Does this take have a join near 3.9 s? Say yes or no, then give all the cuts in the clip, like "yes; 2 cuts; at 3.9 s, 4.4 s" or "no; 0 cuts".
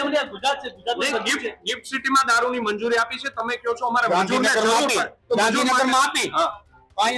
no; 0 cuts